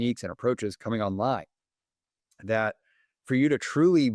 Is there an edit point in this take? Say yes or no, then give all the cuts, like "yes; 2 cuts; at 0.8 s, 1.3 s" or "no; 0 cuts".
no; 0 cuts